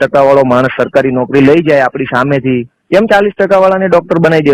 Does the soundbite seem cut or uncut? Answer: uncut